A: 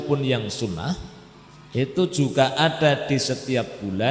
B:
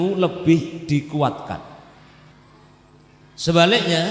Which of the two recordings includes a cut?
B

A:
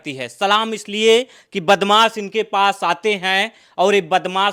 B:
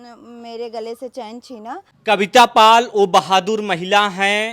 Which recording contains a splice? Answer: B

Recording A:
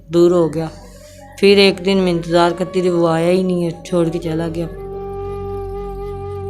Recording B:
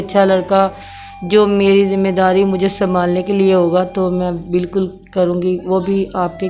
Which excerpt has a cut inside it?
A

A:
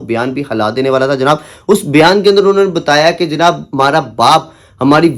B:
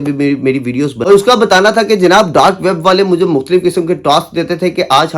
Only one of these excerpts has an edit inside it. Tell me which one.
B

